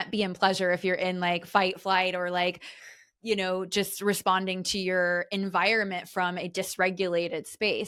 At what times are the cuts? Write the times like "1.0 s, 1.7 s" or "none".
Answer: none